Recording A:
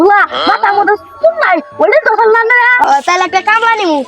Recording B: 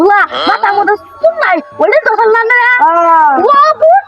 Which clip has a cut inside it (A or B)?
A